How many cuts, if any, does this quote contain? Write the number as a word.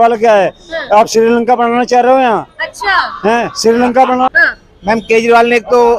one